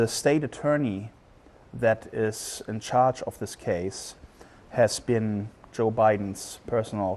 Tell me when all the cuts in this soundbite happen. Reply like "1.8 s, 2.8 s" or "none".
3.1 s